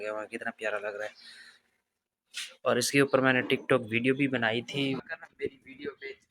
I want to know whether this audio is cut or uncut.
cut